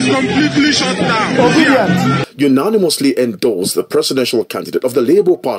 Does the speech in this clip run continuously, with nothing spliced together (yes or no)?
no